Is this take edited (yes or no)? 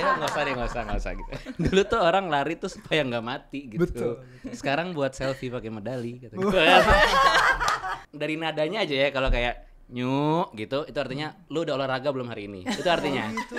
yes